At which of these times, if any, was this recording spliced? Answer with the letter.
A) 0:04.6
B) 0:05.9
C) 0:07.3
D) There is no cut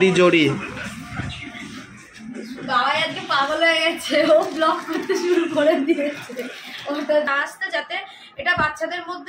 C